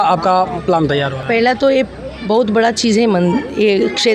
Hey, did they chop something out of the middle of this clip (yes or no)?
no